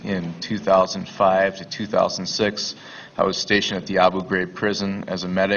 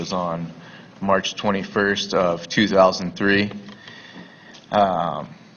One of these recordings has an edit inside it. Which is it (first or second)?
second